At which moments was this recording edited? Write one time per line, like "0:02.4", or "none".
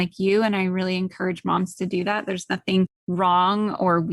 0:03.0

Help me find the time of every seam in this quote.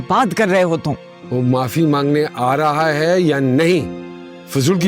0:01.1

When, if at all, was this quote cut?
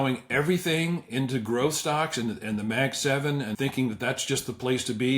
0:03.5

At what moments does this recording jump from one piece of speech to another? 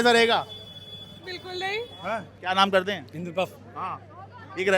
0:02.3

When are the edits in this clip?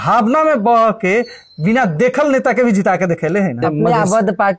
0:03.6

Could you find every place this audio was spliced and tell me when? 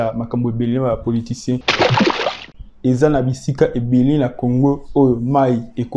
0:02.0

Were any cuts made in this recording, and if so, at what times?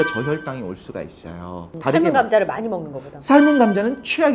0:01.7

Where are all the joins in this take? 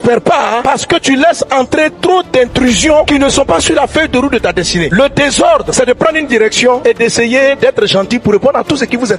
none

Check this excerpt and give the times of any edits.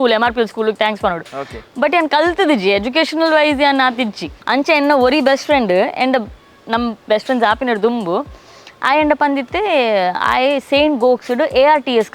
0:04.3

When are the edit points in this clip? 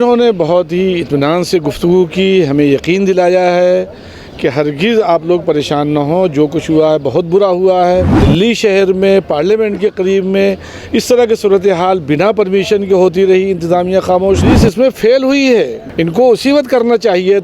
0:08.2
0:14.5
0:15.8

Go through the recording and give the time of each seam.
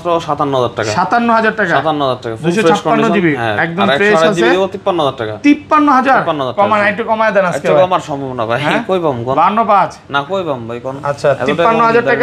none

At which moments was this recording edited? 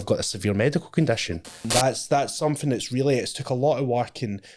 0:01.6

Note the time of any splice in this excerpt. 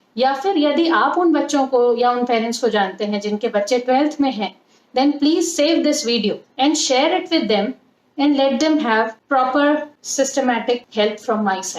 0:06.5
0:09.2
0:10.0
0:10.9

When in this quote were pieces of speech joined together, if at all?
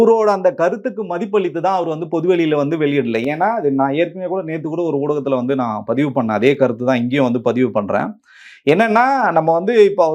none

